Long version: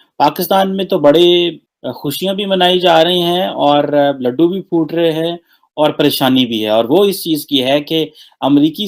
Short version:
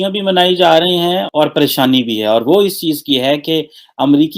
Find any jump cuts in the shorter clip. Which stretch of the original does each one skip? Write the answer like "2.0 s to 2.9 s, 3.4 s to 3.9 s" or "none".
3.4 s to 5.6 s

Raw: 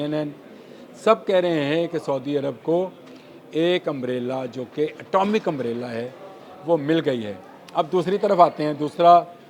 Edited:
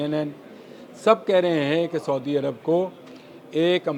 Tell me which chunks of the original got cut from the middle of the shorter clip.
none

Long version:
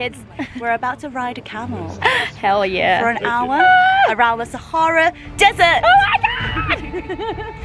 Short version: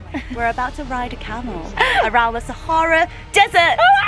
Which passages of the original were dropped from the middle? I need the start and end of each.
2.2 s to 4.0 s

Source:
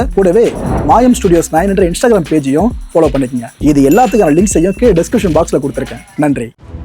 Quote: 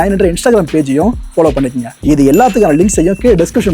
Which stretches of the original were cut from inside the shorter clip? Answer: none

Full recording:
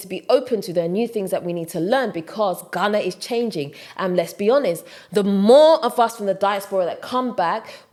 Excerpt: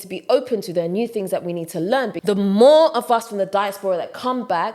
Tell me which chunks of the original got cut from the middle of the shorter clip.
2.1 s to 5.0 s

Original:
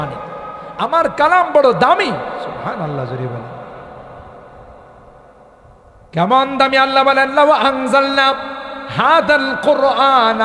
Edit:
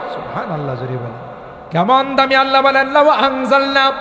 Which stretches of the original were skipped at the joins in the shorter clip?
3.8 s to 6.0 s

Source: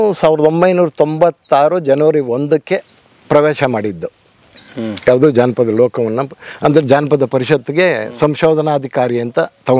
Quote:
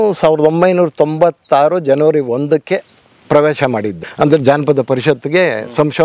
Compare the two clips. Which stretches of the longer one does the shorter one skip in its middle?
4.0 s to 6.4 s

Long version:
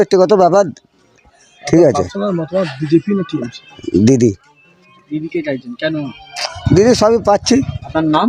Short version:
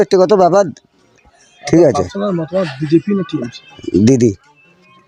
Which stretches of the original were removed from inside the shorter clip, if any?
none

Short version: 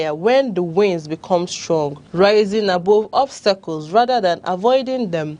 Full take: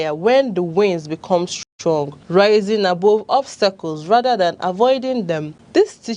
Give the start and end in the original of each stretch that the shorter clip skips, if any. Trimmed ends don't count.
1.5 s to 1.7 s

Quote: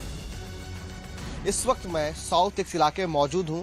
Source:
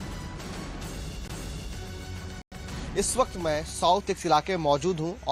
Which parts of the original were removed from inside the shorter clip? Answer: 2.4 s to 2.5 s

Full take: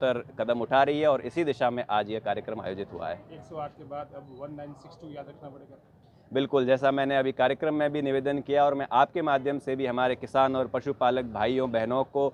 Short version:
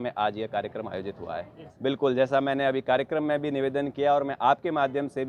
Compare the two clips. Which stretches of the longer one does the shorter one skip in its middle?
3.3 s to 6.1 s

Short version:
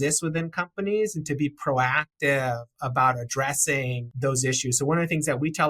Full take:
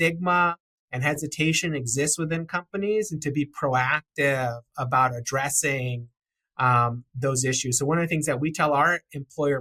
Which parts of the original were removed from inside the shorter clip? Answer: 6.0 s to 7.1 s

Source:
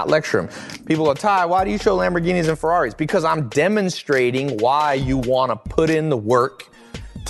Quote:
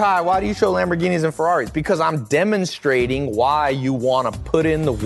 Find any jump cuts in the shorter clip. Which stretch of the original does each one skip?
none

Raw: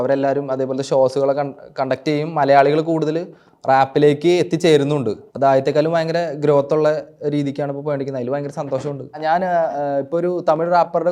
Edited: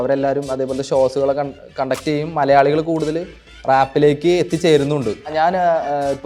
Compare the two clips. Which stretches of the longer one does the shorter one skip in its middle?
5.2 s to 9.1 s

